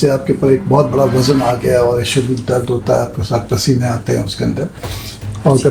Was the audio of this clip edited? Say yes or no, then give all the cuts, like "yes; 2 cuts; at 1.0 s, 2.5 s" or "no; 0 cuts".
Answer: no; 0 cuts